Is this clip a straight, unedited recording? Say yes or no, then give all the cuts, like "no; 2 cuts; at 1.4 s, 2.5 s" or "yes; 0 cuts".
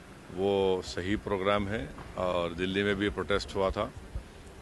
yes; 0 cuts